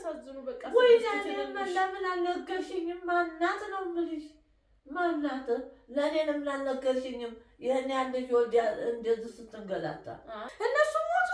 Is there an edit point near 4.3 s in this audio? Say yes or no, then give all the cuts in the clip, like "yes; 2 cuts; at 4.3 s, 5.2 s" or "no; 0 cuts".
no; 1 cut; at 10.4 s